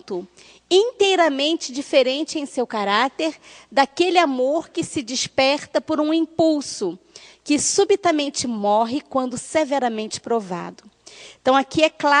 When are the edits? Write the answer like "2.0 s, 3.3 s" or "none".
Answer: none